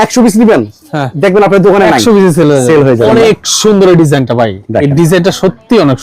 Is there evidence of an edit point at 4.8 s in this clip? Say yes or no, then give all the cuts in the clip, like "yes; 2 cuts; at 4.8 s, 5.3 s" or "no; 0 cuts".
no; 1 cut; at 3.1 s